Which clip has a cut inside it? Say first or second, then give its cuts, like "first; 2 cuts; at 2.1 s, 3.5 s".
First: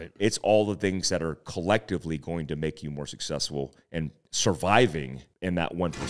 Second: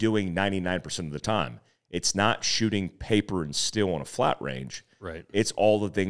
first; 2 cuts; at 4.2 s, 5.2 s